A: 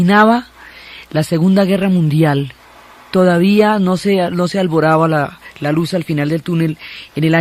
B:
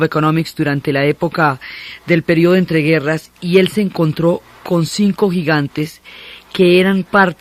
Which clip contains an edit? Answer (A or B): A